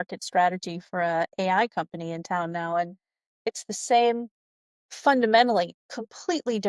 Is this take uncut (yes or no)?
yes